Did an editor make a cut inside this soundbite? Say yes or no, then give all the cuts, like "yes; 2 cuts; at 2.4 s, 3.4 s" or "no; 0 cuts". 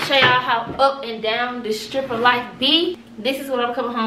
yes; 1 cut; at 3.1 s